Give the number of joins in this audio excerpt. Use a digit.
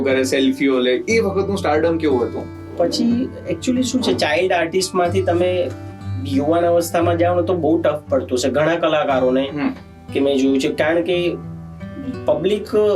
1